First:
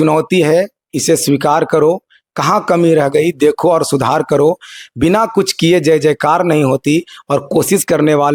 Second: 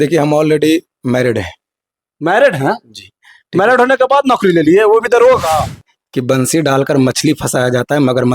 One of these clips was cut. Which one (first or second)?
second